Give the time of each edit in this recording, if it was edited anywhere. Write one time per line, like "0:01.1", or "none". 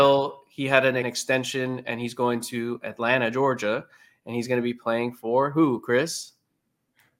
0:01.0